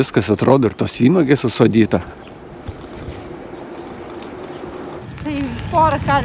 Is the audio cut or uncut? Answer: cut